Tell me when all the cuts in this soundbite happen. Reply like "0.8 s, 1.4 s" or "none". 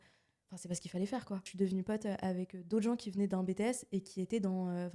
1.5 s